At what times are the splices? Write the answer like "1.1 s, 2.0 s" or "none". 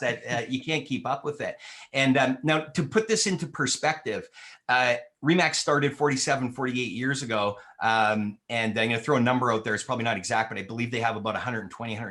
none